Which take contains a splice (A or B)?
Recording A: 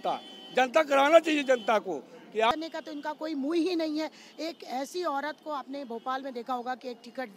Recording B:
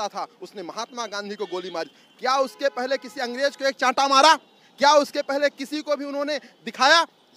A